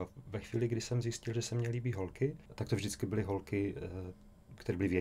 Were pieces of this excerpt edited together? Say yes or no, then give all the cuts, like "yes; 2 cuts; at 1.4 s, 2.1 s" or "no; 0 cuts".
yes; 1 cut; at 2.5 s